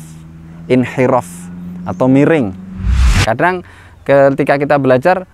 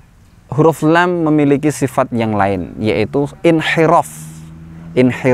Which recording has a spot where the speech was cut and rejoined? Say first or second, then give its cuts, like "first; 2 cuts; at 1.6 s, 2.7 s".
first; 1 cut; at 3.1 s